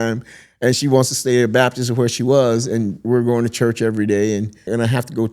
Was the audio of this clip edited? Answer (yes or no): yes